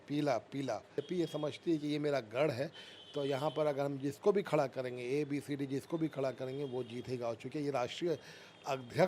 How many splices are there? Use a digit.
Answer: 1